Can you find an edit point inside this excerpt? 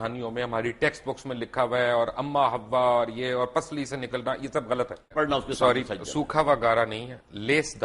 yes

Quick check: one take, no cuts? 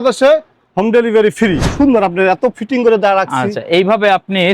no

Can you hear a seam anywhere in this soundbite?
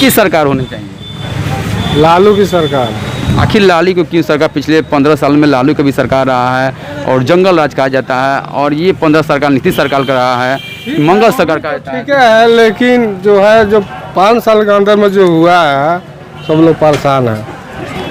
no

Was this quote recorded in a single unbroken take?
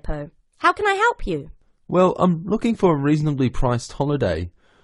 yes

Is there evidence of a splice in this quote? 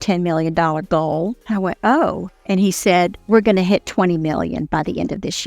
yes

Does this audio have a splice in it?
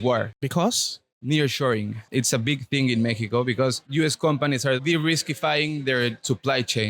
yes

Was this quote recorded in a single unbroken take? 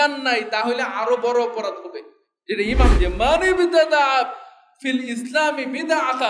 no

